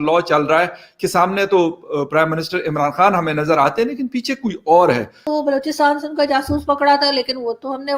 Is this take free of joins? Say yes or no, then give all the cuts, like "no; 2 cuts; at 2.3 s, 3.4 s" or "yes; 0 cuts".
no; 1 cut; at 5.2 s